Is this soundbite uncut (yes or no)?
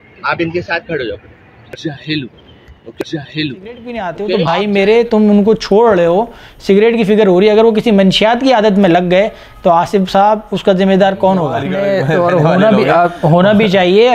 no